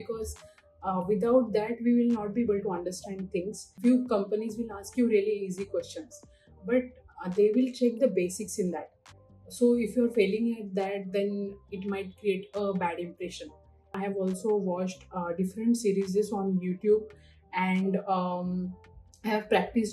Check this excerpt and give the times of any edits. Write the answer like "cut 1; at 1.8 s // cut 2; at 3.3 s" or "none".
cut 1; at 3.6 s // cut 2; at 13.9 s